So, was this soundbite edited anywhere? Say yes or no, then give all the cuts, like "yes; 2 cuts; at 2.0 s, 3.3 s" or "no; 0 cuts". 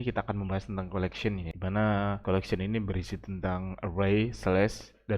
yes; 2 cuts; at 1.5 s, 2.2 s